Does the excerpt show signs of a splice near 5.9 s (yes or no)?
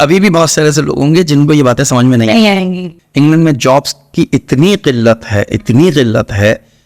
no